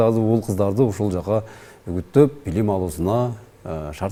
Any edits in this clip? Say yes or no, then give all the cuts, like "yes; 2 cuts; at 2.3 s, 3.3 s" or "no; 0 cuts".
no; 0 cuts